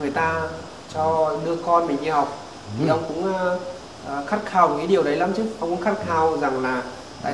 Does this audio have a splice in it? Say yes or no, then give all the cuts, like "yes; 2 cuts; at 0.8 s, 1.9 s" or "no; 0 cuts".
no; 0 cuts